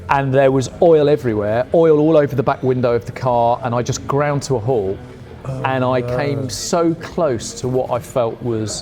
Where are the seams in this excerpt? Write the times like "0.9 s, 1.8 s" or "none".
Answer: none